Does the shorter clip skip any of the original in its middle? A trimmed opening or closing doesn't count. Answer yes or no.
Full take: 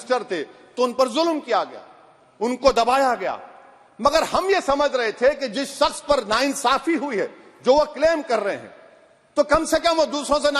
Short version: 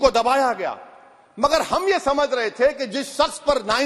no